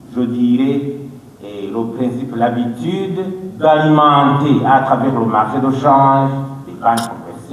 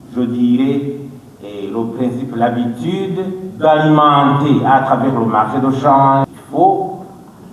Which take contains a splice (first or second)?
second